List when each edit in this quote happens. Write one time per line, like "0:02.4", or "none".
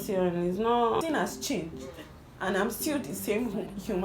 0:01.0